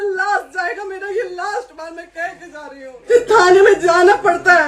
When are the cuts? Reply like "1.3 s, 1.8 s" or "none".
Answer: 3.1 s